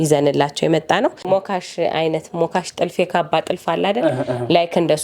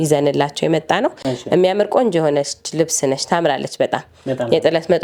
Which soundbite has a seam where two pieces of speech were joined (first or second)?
first